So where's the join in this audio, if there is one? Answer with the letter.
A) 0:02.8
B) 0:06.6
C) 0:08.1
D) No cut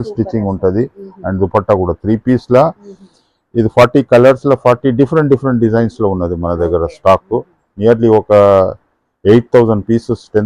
D